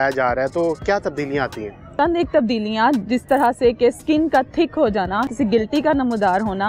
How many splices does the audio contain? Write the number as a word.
two